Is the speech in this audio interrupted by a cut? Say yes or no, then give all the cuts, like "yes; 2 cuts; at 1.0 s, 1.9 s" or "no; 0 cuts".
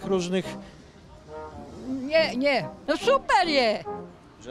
yes; 1 cut; at 2.8 s